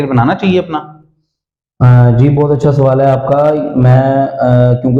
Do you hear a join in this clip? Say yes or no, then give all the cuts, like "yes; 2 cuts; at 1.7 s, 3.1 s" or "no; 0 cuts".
no; 0 cuts